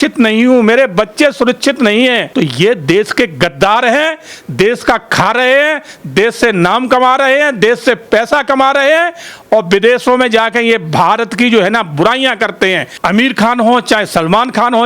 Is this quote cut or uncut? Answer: cut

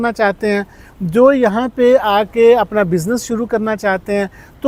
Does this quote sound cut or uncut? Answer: uncut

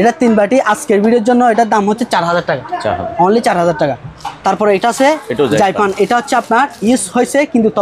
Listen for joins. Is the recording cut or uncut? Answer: uncut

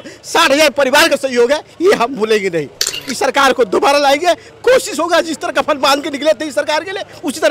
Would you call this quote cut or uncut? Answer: uncut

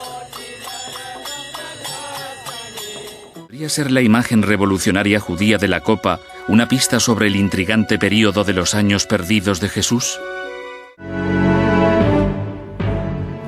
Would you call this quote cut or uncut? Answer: cut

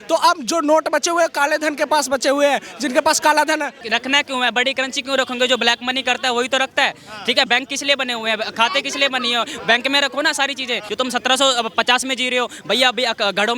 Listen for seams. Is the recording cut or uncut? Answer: cut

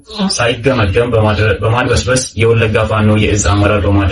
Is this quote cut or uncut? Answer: uncut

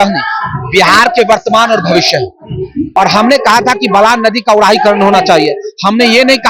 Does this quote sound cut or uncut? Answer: cut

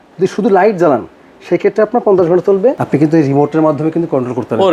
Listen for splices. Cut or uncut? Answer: cut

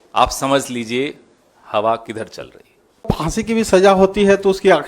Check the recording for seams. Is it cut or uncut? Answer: cut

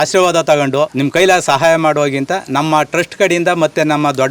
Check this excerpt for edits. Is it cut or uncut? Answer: cut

